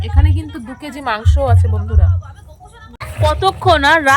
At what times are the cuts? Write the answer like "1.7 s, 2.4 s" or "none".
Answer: 3.0 s